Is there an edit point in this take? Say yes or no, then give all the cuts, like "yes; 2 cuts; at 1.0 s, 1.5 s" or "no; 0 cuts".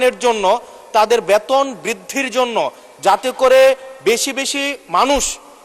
no; 0 cuts